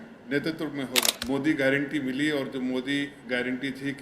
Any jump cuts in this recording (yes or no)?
yes